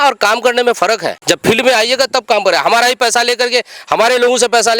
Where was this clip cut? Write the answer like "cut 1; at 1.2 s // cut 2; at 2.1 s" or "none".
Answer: cut 1; at 1.1 s